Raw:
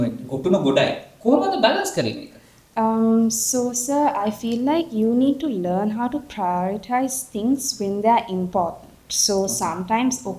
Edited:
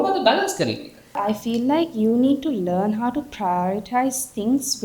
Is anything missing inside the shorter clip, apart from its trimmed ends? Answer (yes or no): yes